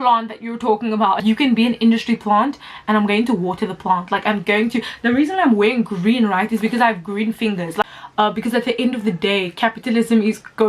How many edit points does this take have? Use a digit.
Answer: 2